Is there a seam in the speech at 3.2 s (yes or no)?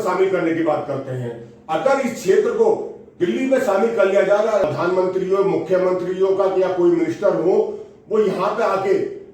no